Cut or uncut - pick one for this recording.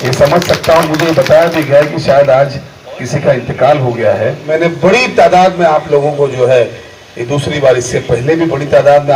cut